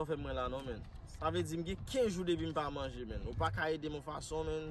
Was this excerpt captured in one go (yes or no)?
yes